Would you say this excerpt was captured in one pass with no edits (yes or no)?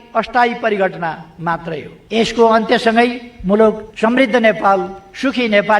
no